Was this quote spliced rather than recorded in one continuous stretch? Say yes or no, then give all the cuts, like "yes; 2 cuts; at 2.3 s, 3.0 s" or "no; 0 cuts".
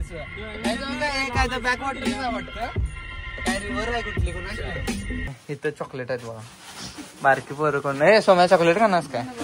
yes; 1 cut; at 5.3 s